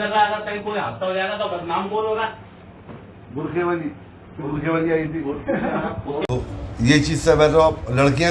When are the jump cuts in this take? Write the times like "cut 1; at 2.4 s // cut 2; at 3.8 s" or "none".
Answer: cut 1; at 6.2 s